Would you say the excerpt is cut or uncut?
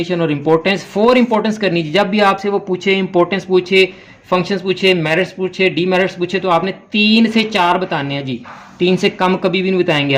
uncut